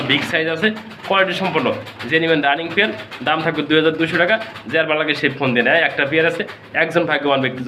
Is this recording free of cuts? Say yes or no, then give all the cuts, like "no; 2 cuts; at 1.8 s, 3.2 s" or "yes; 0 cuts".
yes; 0 cuts